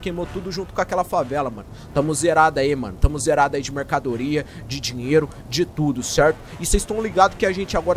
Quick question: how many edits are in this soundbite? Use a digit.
0